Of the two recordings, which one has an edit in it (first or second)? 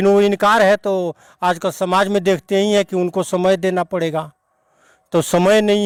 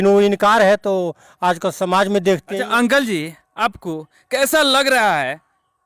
second